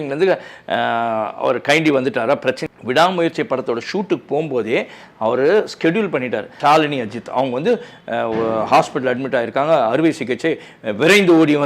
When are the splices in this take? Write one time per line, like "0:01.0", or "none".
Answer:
0:02.6
0:06.5